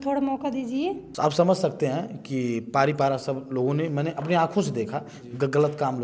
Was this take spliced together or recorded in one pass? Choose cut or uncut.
cut